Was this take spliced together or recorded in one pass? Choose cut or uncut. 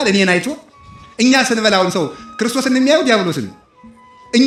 uncut